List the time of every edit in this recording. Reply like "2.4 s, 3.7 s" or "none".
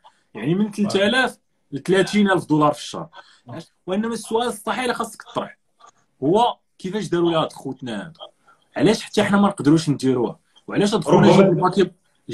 3.5 s